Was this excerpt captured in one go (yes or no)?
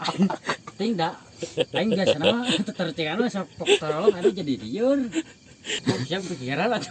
no